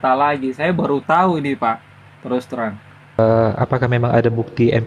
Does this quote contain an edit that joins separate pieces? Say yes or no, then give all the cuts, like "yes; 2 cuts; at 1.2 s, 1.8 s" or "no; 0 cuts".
yes; 1 cut; at 3.2 s